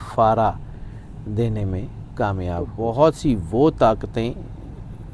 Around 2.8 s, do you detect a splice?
yes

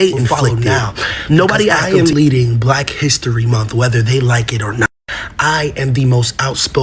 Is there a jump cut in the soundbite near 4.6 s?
no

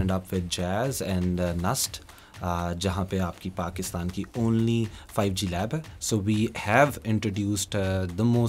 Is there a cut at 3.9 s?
no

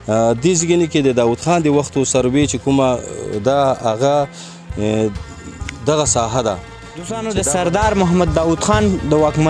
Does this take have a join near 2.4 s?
no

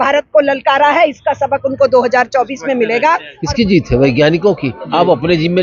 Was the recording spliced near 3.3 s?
yes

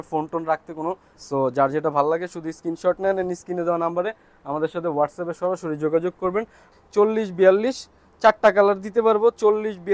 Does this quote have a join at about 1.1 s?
yes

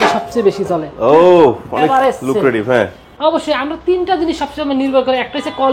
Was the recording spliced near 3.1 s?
yes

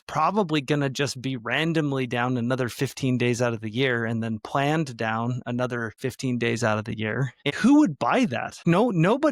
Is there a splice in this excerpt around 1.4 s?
no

